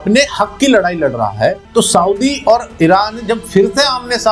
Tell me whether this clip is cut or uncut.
cut